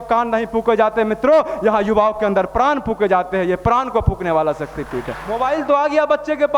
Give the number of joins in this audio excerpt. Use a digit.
1